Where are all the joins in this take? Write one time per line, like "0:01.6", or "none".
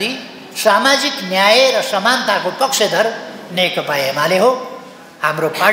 none